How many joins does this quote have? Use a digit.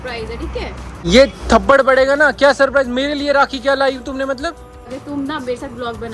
2